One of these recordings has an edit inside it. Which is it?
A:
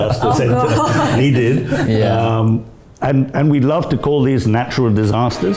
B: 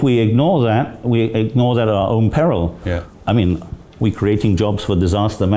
B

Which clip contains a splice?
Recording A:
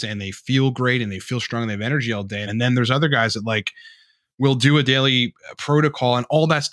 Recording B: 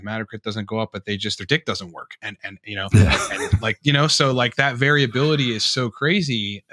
A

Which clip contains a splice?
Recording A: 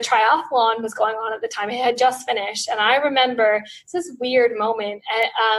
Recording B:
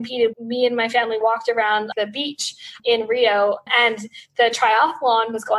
B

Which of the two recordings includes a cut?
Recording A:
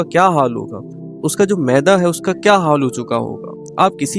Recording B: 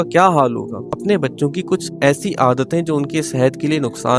B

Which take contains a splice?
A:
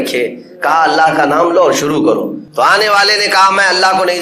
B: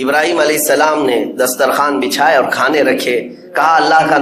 A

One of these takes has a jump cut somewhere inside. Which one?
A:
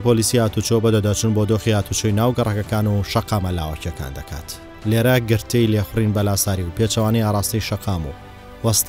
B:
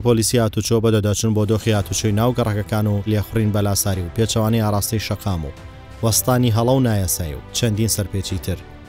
B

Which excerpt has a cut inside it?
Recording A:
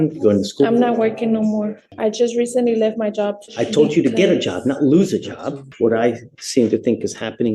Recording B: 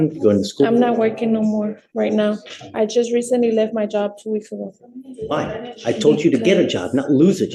A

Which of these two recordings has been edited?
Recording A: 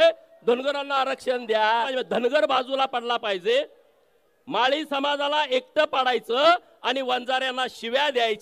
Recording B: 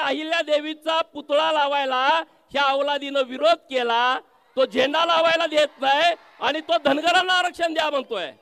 A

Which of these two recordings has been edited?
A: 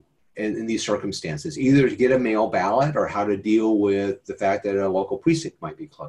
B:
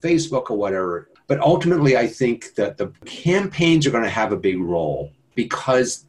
B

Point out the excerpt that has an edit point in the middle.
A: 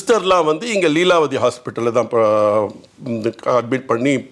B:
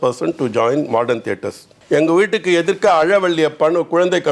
B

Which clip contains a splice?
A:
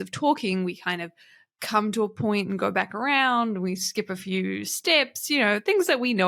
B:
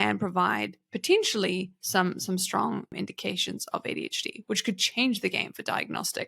B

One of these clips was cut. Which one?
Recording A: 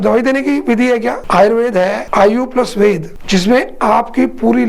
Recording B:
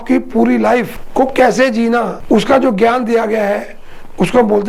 A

